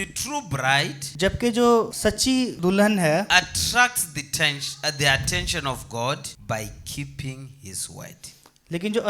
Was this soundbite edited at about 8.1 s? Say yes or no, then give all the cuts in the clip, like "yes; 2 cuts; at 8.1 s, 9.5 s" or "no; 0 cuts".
no; 3 cuts; at 1.0 s, 2.3 s, 6.3 s